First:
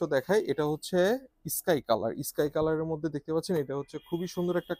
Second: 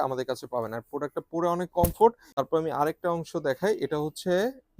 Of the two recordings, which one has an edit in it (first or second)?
second